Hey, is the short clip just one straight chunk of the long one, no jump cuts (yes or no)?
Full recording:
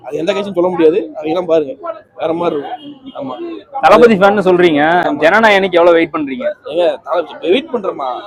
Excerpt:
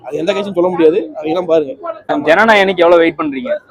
no